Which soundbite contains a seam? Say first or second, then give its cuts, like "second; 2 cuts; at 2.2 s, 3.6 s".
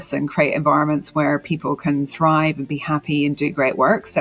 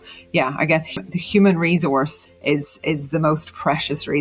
second; 2 cuts; at 1.0 s, 2.2 s